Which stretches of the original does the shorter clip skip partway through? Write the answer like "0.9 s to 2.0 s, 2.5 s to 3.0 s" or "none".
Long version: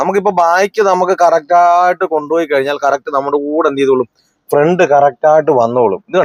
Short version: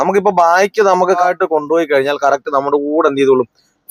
1.2 s to 1.8 s